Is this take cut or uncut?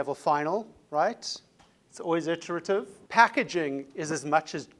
cut